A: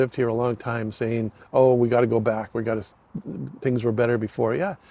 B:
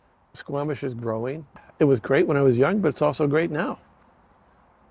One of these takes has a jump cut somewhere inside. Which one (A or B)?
B